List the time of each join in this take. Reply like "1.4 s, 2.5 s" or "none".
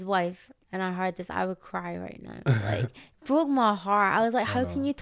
none